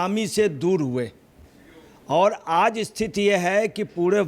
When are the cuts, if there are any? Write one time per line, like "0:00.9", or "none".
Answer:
none